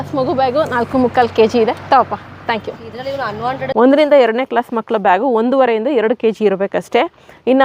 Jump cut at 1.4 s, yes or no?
no